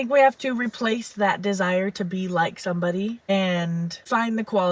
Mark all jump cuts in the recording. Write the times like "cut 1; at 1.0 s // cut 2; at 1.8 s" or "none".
none